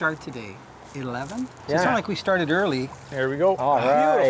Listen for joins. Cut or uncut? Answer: cut